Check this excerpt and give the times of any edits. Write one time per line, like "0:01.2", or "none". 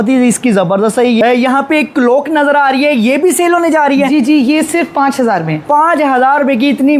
0:01.2